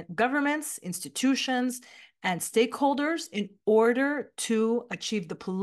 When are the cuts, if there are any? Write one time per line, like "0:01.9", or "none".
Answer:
none